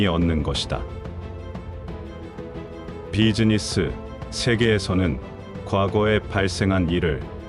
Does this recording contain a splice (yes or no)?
no